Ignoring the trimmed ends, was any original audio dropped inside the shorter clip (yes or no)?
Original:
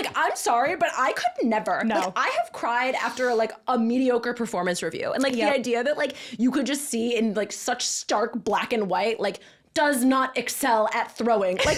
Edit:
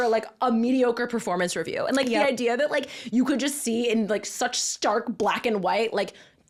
no